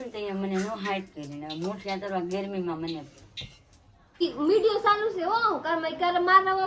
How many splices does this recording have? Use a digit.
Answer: 1